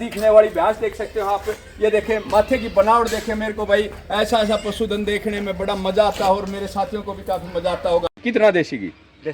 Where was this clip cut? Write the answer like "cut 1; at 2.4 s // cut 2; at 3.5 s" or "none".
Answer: cut 1; at 8.2 s